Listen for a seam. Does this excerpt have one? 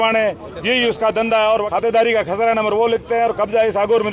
yes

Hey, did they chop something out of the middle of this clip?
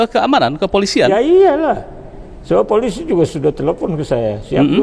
no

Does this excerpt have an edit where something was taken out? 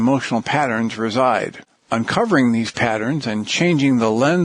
no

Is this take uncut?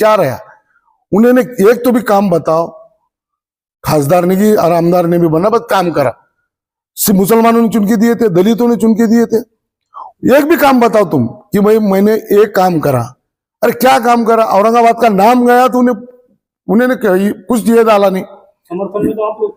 yes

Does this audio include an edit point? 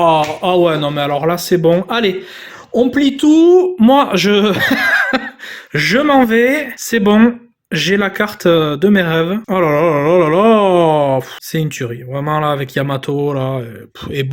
yes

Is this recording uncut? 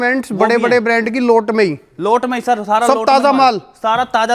yes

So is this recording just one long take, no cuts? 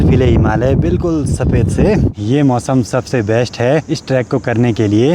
no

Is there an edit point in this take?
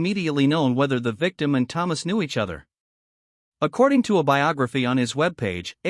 no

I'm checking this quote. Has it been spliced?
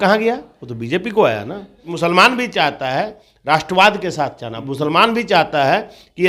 yes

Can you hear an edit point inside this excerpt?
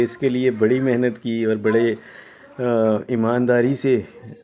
no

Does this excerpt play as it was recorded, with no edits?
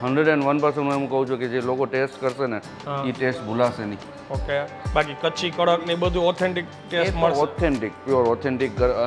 yes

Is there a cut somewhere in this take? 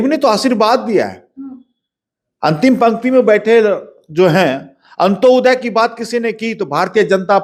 no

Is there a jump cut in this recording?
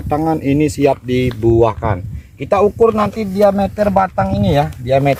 no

